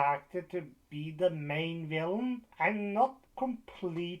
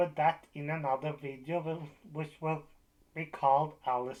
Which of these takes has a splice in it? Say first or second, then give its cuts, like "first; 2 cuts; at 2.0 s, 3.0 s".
first; 2 cuts; at 2.5 s, 3.2 s